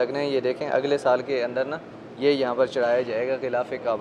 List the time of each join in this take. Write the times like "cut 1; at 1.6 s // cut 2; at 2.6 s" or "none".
none